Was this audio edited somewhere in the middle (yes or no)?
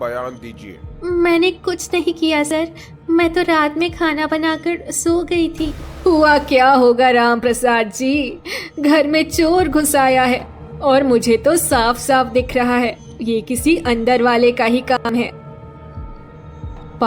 yes